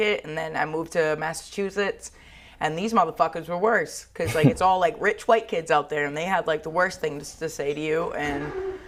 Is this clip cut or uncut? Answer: uncut